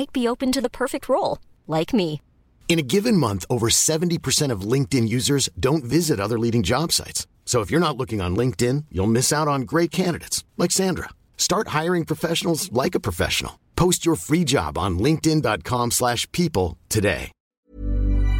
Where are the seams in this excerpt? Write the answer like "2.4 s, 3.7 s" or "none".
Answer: 17.4 s